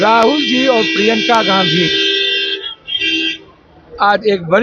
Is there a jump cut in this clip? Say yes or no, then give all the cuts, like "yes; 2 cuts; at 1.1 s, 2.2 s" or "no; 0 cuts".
no; 0 cuts